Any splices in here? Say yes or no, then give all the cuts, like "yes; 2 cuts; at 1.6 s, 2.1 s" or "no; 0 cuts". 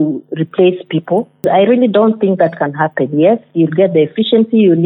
yes; 1 cut; at 1.5 s